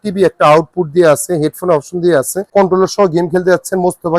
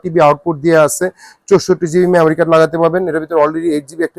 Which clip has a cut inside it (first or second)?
first